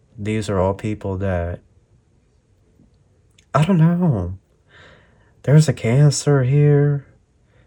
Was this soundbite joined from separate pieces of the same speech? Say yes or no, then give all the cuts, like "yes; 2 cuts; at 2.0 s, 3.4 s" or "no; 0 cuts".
no; 0 cuts